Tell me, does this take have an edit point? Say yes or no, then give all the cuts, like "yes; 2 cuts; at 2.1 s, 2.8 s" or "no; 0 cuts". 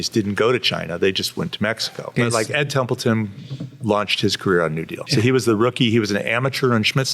yes; 2 cuts; at 2.1 s, 4.9 s